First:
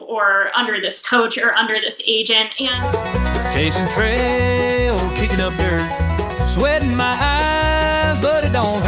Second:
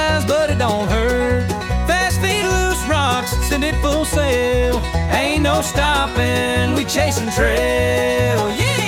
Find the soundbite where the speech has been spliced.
first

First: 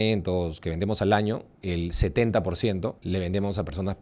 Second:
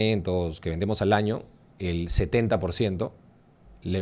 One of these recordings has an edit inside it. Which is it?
first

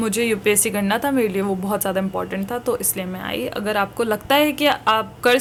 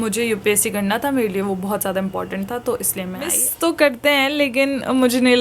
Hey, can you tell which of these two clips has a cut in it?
second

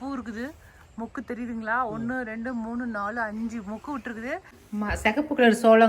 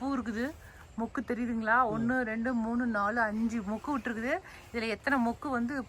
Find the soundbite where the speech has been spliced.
first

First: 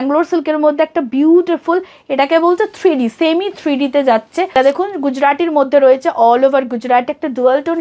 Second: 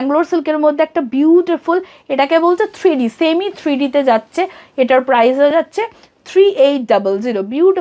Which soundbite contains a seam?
first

